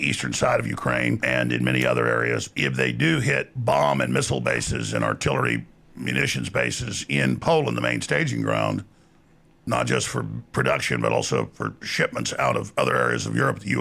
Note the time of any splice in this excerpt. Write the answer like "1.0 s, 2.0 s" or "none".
1.2 s, 2.5 s, 3.5 s